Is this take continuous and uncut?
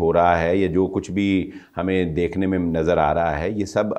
yes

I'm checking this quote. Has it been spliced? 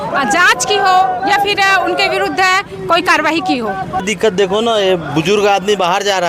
yes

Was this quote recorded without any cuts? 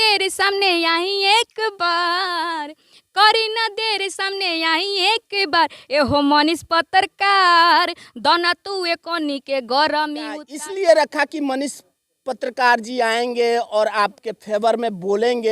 no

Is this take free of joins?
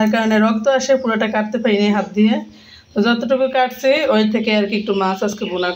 yes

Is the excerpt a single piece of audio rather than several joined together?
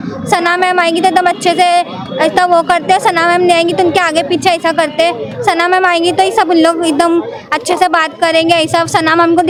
yes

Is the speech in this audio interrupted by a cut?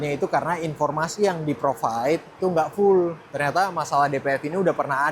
yes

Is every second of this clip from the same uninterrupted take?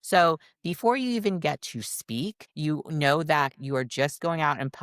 no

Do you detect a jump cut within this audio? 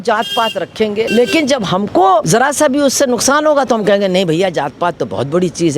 yes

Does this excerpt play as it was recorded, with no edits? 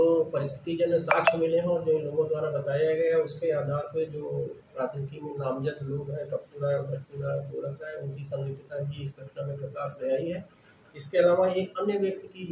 yes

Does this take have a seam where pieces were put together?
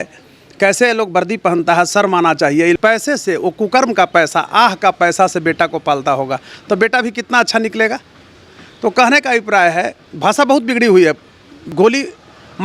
yes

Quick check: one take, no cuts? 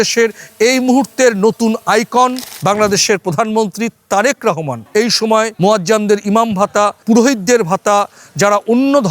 no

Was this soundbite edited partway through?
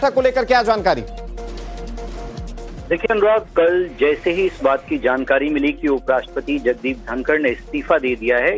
yes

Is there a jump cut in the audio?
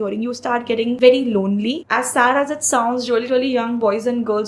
yes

